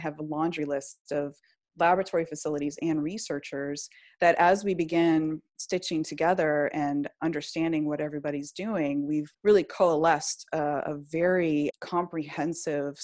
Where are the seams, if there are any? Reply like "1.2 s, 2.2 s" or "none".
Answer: 9.3 s, 11.7 s